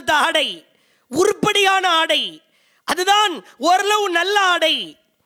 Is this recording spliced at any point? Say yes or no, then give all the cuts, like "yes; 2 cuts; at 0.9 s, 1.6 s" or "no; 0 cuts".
no; 0 cuts